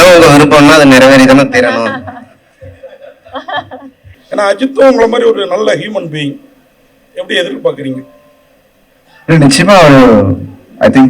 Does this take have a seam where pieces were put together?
yes; 1 cut; at 4.1 s

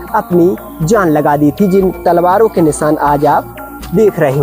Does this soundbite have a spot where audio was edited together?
no; 0 cuts

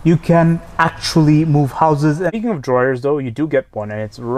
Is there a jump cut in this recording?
yes; 1 cut; at 2.3 s

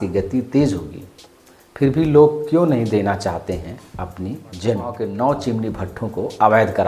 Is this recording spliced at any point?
yes; 1 cut; at 5.0 s

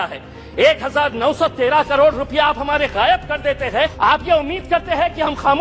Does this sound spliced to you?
yes; 1 cut; at 3.9 s

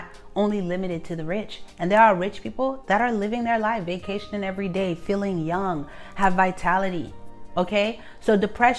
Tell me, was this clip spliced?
no; 0 cuts

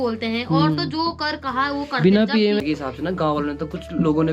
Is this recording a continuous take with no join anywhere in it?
no; 1 cut; at 2.6 s

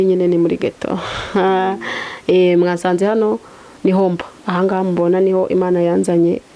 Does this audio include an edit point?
no; 0 cuts

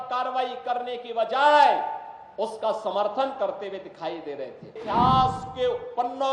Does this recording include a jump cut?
yes; 1 cut; at 4.8 s

